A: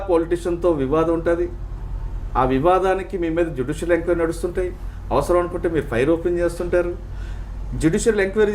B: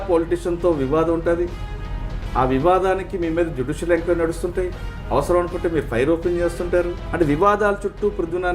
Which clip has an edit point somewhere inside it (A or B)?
B